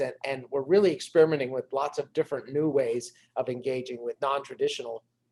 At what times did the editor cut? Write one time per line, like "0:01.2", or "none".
none

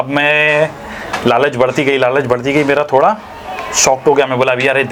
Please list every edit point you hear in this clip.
none

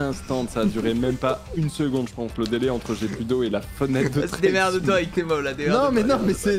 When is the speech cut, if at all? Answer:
none

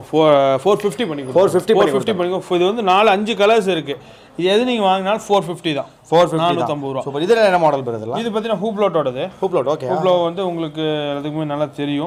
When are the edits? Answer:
none

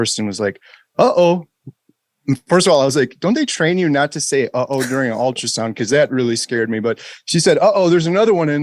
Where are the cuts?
none

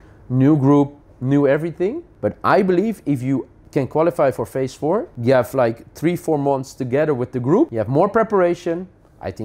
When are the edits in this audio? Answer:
0:02.1
0:03.6
0:05.1
0:07.8

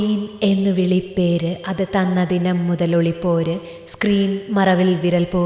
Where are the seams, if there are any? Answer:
none

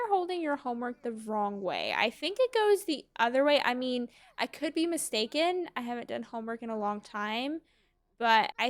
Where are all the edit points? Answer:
none

